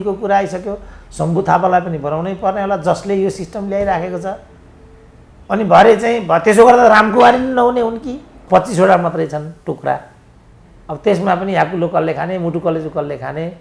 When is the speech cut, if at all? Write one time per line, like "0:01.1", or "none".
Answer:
0:08.3